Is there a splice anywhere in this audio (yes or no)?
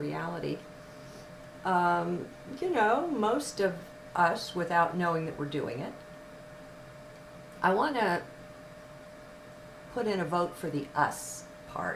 yes